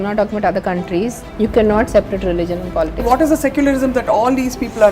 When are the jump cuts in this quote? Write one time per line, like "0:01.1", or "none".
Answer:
0:01.2
0:03.0

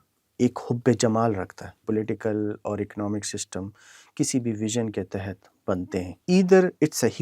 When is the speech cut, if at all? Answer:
0:01.8
0:06.1

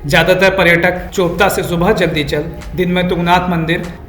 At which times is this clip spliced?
0:01.0

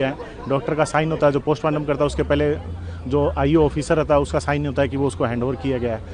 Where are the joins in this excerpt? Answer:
none

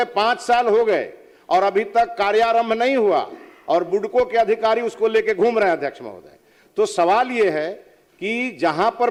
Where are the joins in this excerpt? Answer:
none

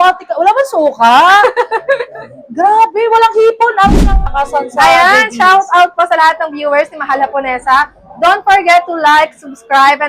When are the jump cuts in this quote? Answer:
0:04.3

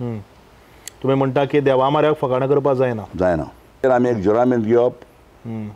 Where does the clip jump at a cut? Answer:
0:03.8

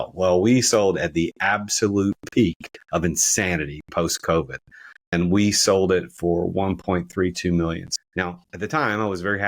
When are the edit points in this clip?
0:05.1
0:07.8

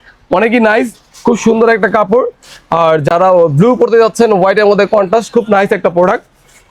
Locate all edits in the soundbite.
none

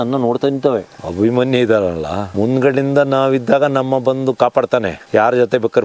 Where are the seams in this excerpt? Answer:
0:00.9
0:02.3

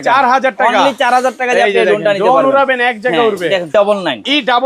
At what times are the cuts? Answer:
0:03.7

